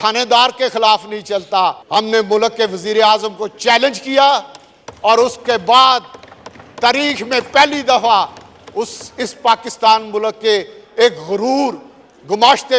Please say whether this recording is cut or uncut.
cut